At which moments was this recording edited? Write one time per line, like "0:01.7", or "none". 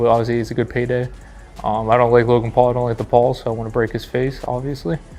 none

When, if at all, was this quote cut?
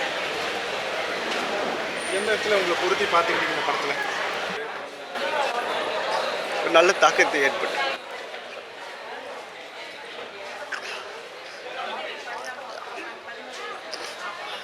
0:04.5

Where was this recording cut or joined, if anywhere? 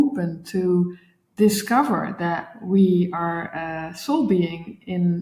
none

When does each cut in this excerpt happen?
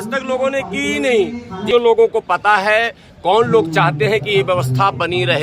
0:01.6

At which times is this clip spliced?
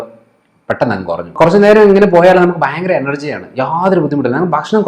0:01.3

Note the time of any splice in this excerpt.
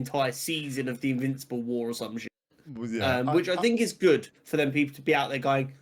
none

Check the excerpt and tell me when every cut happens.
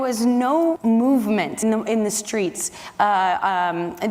0:00.8
0:01.6

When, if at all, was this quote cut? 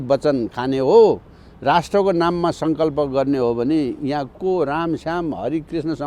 none

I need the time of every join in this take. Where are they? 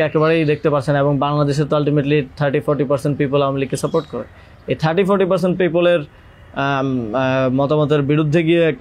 none

